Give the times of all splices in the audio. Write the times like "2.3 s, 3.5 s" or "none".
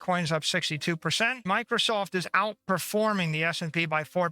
1.4 s